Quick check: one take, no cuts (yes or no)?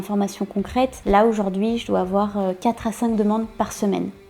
no